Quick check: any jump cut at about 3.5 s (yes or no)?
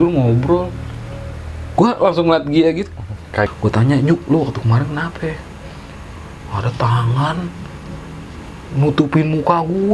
yes